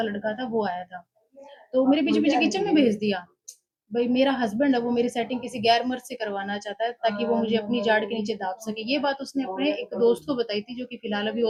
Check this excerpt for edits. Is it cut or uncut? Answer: uncut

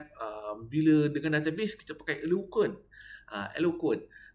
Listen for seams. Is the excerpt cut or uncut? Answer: uncut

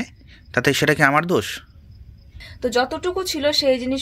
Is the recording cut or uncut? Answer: cut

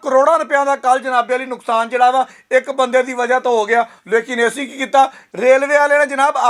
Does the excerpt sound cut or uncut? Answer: uncut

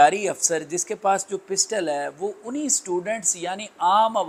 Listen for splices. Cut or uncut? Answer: uncut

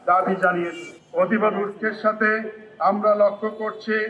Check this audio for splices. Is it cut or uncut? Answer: uncut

